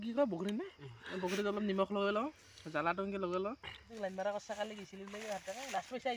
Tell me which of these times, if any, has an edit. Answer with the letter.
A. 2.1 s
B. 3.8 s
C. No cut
B